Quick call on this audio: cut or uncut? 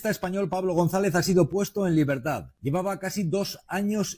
cut